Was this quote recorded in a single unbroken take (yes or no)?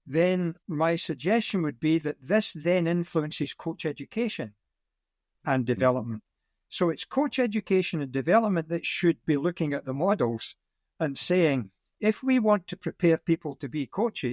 yes